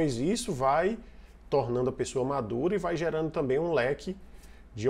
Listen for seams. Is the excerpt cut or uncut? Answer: uncut